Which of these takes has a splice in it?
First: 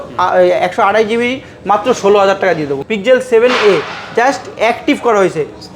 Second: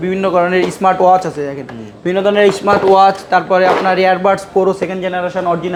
first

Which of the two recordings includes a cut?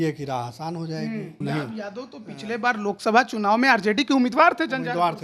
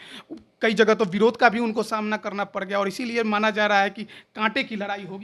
first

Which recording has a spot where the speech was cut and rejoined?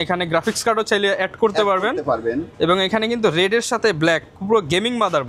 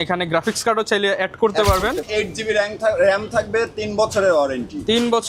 second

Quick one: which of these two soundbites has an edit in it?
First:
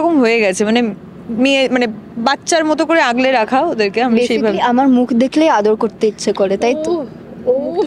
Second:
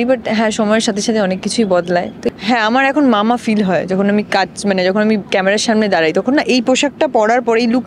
second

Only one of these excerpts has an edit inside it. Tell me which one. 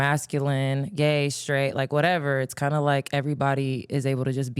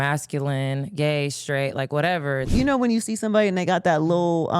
second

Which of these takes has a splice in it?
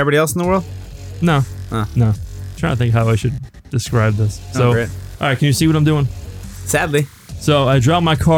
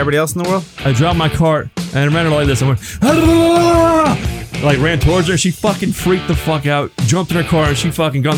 second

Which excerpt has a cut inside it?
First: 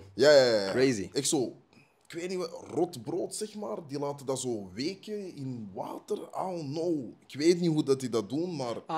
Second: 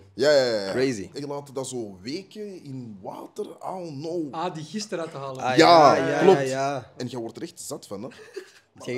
second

